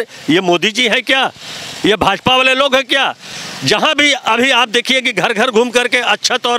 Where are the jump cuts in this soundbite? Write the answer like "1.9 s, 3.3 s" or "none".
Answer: none